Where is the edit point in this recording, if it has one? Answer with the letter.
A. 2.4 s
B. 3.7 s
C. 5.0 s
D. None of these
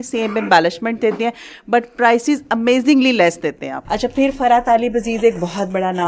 B